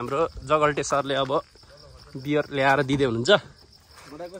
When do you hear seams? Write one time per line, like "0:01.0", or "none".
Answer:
none

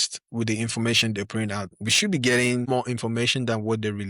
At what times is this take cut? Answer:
0:01.7
0:02.7

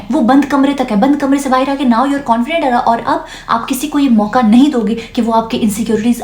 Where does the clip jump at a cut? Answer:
none

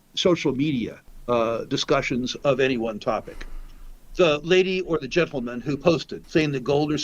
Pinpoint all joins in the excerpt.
0:01.1
0:06.2

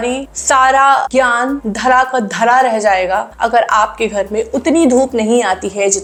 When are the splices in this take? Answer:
none

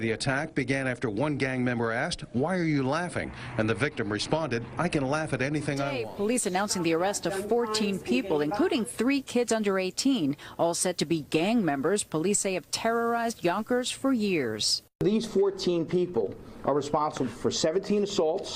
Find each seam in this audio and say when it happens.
0:06.0

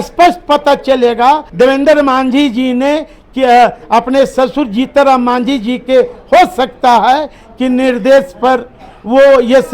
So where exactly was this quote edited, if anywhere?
0:01.5

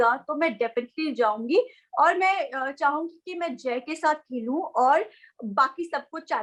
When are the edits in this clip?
none

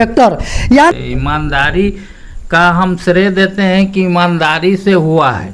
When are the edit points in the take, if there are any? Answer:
0:00.9

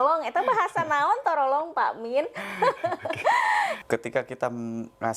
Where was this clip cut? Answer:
0:03.8

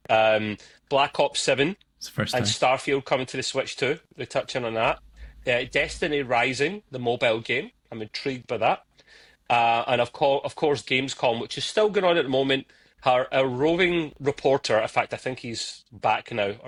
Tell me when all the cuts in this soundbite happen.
none

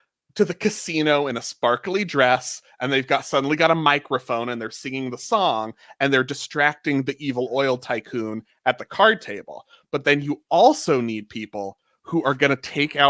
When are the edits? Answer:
none

